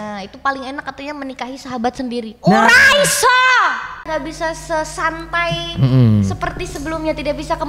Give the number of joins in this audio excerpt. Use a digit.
1